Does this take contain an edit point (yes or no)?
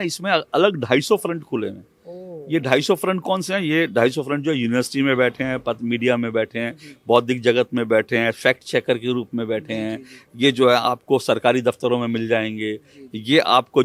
no